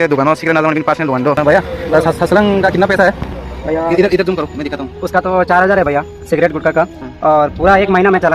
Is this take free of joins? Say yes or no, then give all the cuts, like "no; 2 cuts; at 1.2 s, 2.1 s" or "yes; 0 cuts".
no; 2 cuts; at 1.4 s, 7.0 s